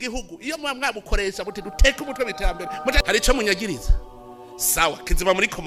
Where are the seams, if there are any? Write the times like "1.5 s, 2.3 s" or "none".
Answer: 3.0 s